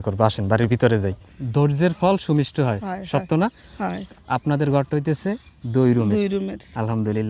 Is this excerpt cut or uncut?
cut